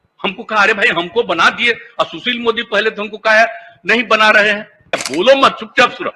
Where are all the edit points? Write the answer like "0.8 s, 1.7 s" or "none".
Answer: 5.0 s